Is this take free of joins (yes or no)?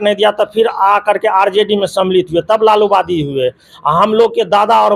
yes